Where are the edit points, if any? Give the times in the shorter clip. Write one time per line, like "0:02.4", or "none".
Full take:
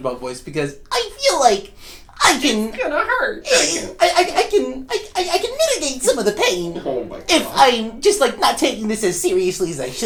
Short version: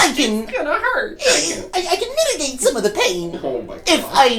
0:01.6